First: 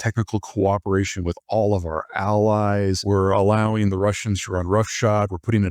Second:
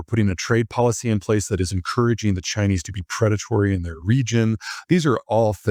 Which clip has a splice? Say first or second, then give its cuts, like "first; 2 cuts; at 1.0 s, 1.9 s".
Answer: first; 1 cut; at 3.0 s